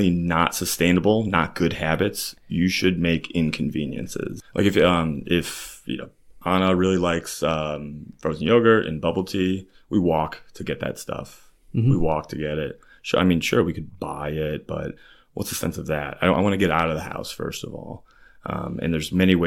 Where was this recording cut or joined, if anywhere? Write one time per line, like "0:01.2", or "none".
0:04.4

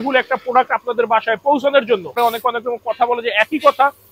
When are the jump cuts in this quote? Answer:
0:02.2

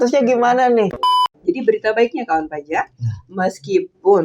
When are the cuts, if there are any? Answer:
0:01.0

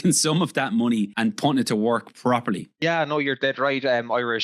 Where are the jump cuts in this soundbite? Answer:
0:01.1
0:02.8

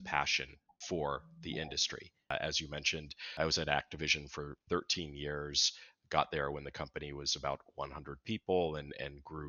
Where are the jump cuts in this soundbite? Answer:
0:02.3

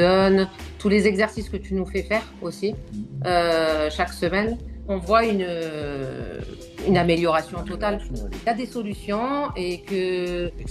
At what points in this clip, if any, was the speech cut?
0:08.4

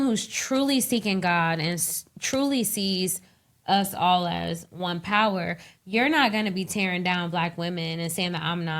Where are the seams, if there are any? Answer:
none

